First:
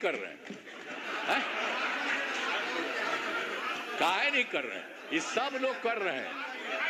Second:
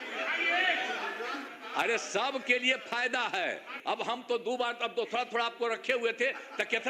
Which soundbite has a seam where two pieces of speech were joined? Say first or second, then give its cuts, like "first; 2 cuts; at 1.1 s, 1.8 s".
second; 2 cuts; at 1.4 s, 3.8 s